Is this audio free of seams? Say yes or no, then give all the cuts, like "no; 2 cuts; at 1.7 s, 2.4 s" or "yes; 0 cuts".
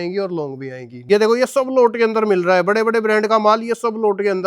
no; 1 cut; at 1.0 s